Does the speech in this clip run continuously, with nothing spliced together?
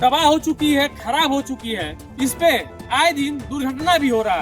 yes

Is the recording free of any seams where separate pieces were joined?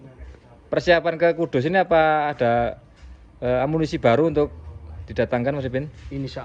yes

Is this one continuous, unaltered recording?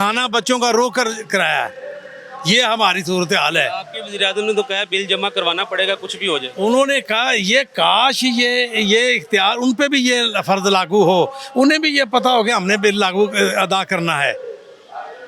yes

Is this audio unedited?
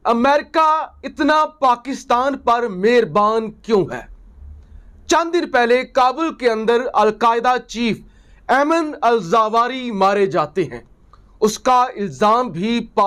yes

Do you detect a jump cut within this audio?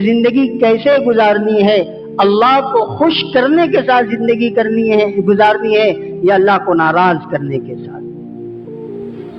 yes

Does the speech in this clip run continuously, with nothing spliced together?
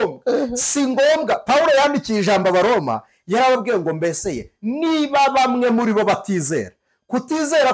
yes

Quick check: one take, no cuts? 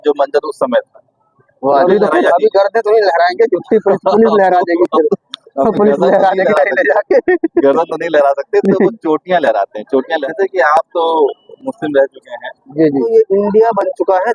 no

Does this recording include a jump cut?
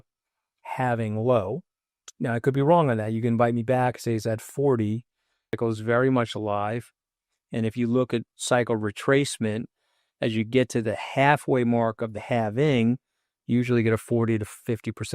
yes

